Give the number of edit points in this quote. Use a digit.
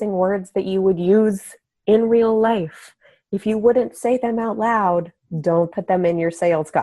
1